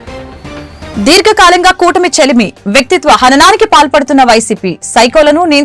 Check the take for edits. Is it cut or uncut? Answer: cut